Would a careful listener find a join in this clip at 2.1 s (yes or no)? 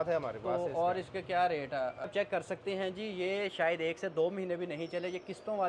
yes